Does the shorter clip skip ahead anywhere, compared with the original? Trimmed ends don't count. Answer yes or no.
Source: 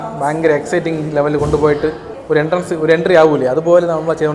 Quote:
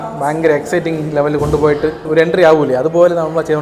yes